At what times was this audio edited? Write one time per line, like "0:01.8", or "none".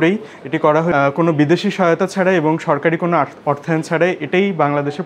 0:00.9